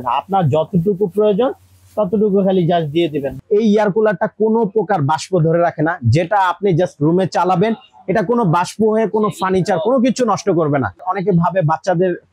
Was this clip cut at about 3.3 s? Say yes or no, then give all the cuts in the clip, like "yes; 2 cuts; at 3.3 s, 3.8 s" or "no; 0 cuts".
yes; 2 cuts; at 3.3 s, 11.1 s